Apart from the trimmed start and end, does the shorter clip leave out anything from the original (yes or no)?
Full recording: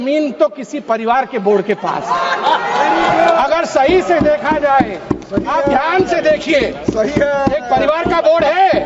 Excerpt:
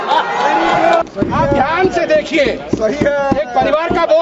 yes